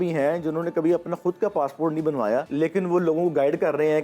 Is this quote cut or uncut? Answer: cut